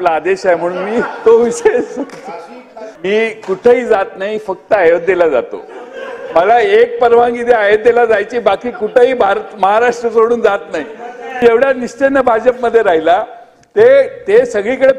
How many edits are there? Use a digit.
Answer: 2